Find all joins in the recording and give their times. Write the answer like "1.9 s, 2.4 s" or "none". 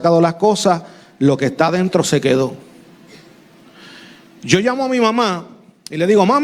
none